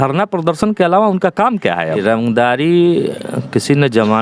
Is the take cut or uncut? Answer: cut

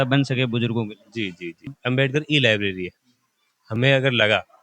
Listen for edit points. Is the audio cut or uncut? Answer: cut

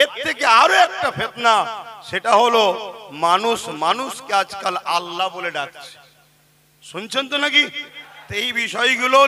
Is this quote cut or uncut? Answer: uncut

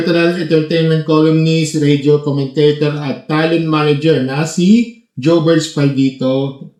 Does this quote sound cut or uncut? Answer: uncut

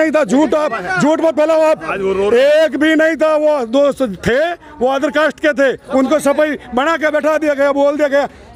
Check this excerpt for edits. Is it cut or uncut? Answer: uncut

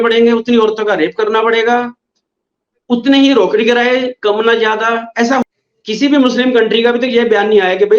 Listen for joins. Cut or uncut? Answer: cut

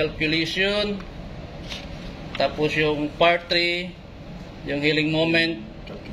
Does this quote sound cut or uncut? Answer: uncut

